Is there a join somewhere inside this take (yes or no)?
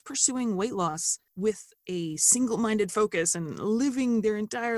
no